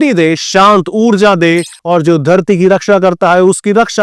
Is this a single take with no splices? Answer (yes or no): no